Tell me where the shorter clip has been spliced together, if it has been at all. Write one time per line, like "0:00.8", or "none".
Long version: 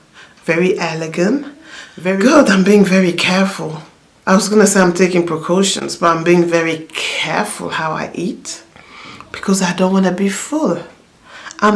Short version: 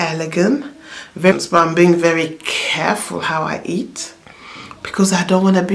0:01.3